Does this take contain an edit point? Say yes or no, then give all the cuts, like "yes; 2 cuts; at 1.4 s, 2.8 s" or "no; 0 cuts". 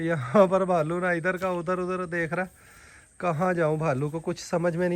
no; 0 cuts